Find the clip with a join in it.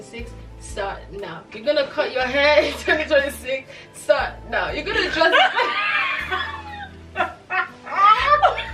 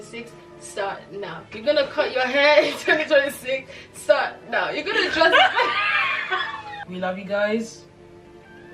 second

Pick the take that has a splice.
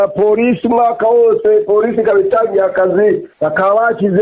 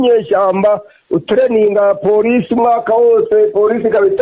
first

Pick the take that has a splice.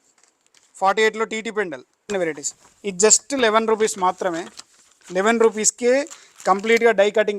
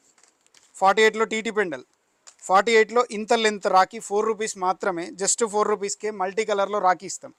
first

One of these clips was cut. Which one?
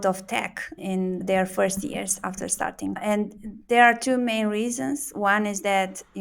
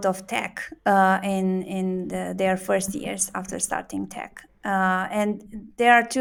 first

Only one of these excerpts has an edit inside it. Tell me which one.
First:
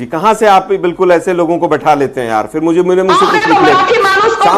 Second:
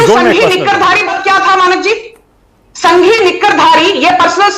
second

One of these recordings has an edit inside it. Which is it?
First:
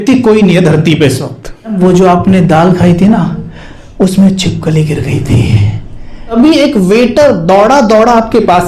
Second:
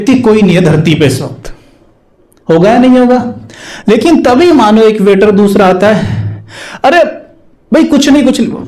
first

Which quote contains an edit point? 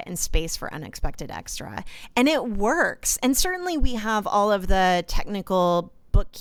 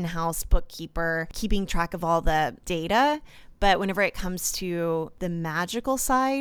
second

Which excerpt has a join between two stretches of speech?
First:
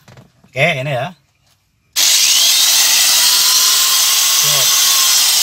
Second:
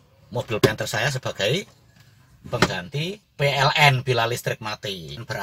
second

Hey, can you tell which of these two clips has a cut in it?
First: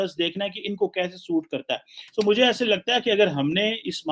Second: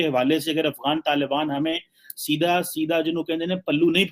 first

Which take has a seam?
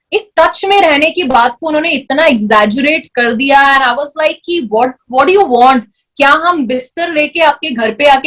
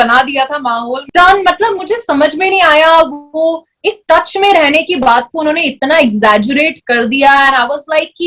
second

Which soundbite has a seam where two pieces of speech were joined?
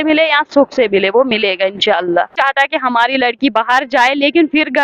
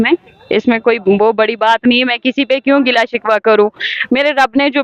first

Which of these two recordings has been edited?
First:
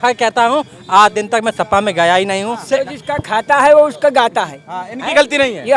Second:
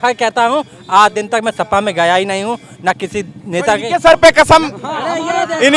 first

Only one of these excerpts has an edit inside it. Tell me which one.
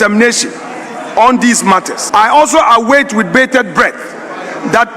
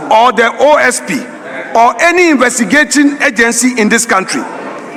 first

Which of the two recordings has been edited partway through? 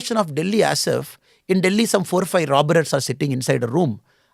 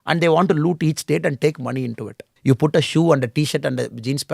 second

